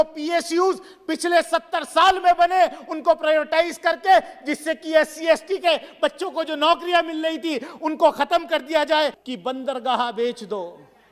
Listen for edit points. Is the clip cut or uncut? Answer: cut